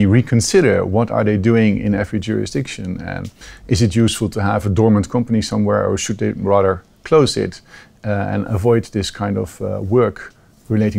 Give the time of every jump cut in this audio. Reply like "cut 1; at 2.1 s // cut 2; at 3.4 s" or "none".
none